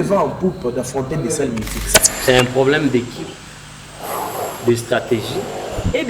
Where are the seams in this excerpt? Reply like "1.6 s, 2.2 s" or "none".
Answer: 2.0 s